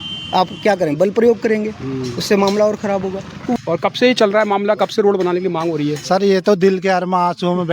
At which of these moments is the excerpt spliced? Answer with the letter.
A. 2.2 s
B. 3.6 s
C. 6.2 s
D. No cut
B